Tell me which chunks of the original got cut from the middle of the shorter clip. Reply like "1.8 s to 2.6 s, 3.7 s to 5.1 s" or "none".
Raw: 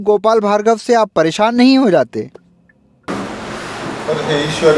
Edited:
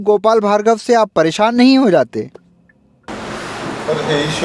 3.1 s to 3.3 s